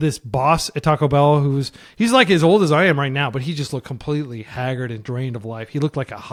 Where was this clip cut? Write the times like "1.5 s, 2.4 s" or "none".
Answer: none

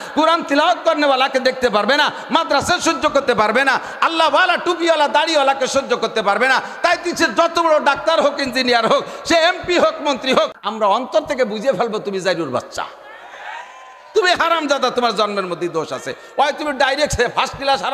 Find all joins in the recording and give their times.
10.6 s

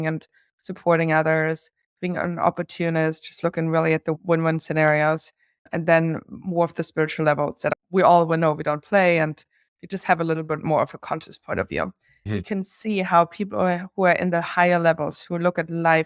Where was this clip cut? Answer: 4.1 s, 7.7 s

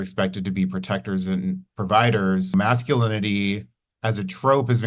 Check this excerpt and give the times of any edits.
2.5 s

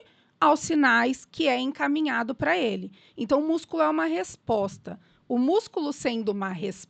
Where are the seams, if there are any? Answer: none

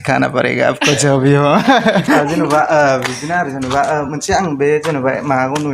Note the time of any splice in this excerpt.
2.2 s

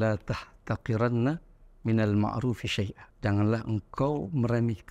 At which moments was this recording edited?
3.0 s

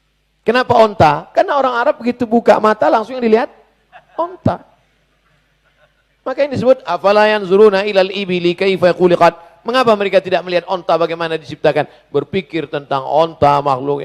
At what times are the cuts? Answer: none

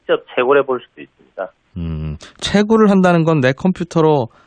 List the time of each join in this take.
1.5 s

